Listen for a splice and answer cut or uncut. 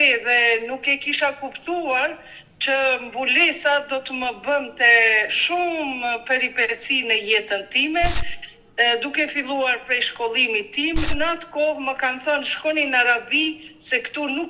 cut